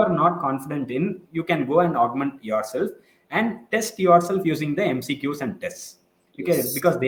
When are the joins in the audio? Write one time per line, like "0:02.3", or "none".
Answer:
none

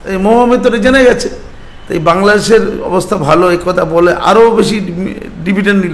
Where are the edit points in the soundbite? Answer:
none

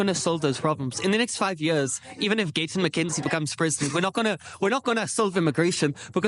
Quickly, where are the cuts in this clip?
none

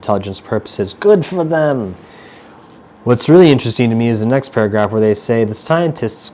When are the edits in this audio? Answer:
none

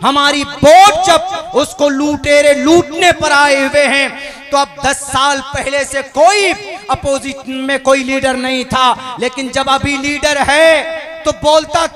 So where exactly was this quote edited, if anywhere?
none

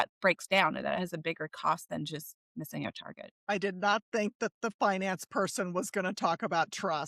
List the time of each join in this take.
none

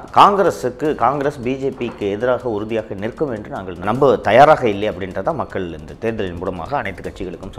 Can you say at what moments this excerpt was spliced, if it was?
0:03.8

